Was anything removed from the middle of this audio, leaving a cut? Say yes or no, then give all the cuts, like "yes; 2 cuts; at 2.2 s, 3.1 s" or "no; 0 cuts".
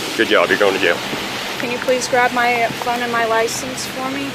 yes; 1 cut; at 1.5 s